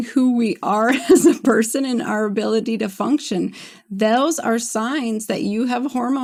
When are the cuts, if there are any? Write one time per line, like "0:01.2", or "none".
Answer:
none